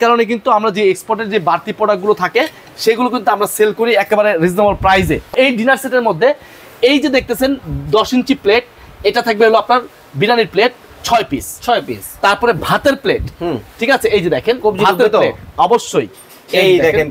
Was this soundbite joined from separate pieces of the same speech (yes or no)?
yes